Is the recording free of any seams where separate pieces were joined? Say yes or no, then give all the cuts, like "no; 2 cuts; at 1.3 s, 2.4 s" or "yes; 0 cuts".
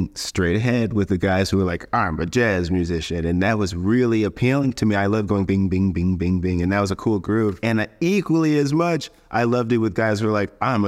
yes; 0 cuts